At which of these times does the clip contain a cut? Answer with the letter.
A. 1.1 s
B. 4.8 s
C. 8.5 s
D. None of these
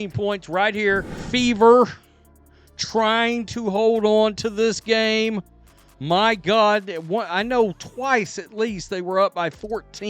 A